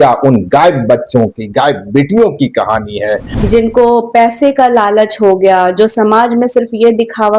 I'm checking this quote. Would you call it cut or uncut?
cut